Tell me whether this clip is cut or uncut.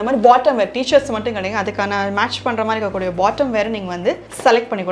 uncut